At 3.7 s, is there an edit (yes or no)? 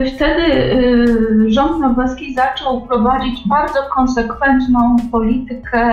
no